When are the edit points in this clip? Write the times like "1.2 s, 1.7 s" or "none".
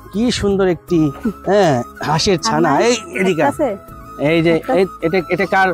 none